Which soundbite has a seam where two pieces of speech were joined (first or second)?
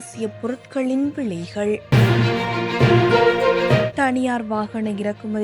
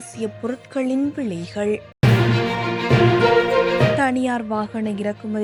first